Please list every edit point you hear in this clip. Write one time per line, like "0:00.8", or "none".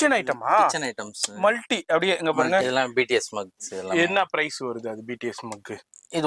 0:02.6